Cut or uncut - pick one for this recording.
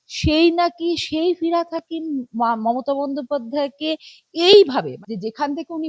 cut